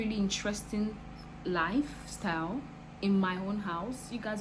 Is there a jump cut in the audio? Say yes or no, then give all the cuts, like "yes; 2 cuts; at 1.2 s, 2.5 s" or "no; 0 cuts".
no; 0 cuts